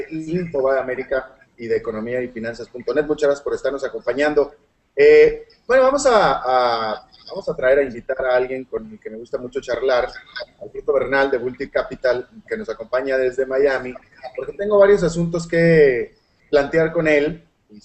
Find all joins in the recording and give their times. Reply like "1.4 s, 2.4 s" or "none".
2.8 s